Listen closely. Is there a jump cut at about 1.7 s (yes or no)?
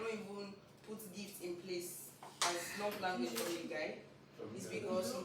no